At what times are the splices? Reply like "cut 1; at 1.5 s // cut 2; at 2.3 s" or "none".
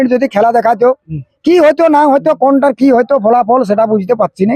none